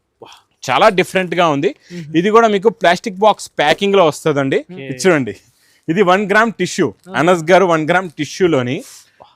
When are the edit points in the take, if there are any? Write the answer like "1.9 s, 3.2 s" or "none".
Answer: 4.8 s